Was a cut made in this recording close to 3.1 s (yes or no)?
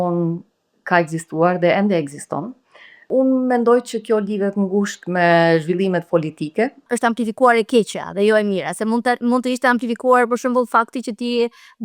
yes